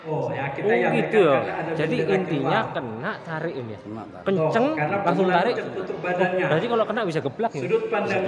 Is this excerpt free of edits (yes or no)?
yes